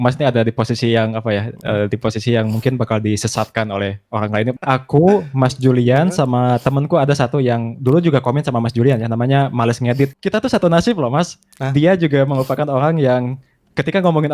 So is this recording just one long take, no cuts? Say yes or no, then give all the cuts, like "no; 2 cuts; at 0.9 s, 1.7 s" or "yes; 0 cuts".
no; 2 cuts; at 4.5 s, 10.2 s